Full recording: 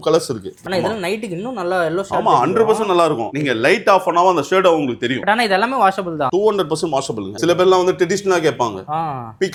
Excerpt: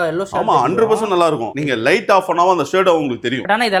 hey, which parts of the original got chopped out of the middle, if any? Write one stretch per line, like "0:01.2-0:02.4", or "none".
none